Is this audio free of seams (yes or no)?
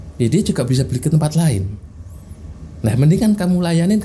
yes